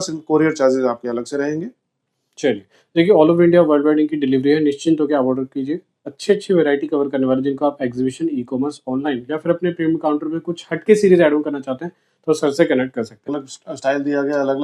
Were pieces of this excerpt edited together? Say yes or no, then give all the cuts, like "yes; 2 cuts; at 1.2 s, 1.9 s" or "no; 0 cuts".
yes; 1 cut; at 13.5 s